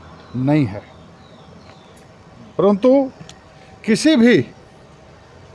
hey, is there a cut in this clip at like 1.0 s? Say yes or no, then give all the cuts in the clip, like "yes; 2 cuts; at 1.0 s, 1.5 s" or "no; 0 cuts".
no; 0 cuts